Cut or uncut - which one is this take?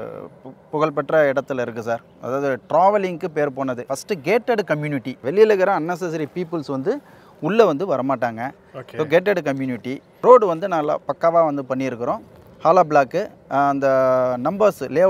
cut